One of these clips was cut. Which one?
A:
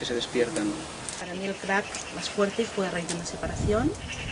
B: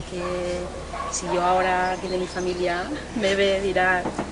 A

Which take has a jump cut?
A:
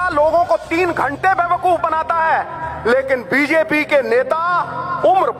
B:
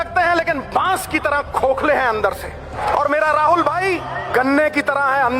B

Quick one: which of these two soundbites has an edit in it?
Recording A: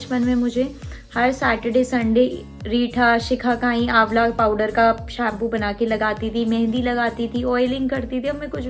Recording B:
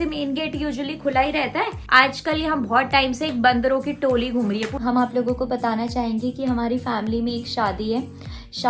B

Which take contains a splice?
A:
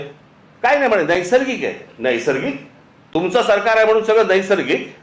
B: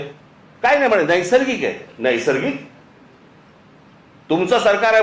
A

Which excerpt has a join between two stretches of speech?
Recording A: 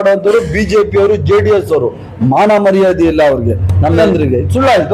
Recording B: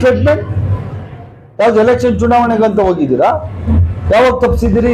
A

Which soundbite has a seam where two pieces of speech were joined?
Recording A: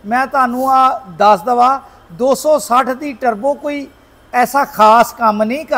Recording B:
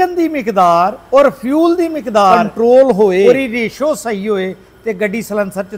B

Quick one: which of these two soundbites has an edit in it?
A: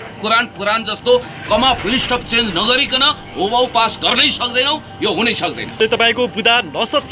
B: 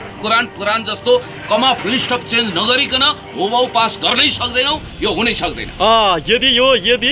A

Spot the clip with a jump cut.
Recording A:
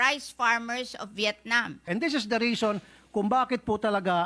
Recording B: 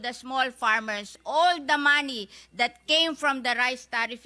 A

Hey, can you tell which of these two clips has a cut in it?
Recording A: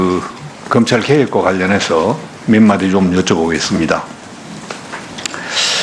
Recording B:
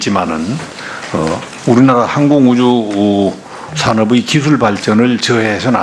A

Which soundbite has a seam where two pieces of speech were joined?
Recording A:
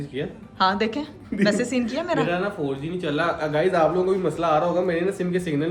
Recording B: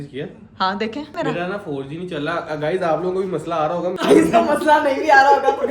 B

